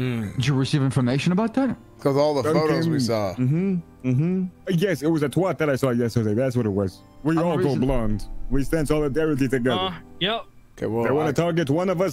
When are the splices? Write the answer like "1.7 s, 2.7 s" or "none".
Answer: 1.9 s, 4.6 s, 7.1 s